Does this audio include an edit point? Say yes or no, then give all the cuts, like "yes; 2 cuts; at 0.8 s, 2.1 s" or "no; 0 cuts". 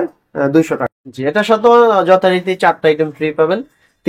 yes; 1 cut; at 1.1 s